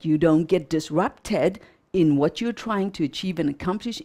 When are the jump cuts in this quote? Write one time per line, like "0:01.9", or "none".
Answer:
none